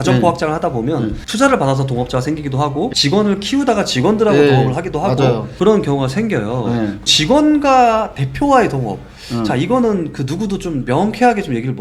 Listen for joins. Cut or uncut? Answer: uncut